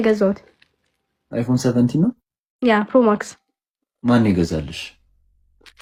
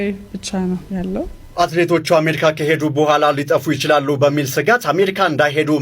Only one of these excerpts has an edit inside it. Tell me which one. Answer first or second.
second